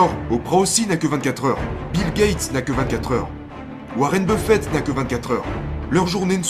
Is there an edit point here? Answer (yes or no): no